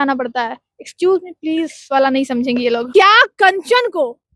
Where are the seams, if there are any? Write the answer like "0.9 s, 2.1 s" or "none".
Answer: 2.9 s